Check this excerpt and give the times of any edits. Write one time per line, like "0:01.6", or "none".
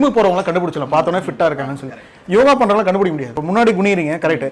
0:03.4